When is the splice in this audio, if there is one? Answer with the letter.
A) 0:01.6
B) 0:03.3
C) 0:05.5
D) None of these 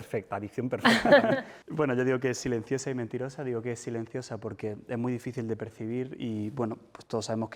A